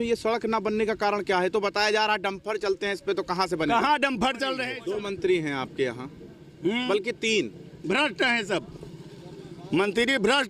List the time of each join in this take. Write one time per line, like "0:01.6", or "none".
0:04.7